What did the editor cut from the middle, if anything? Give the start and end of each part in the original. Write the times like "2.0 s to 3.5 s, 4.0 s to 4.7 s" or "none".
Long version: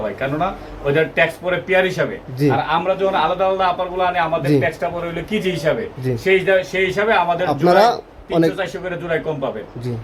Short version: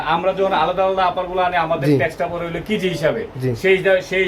none